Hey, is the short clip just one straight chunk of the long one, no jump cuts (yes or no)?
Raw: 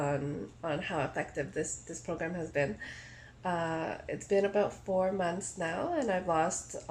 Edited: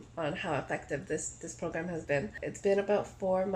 no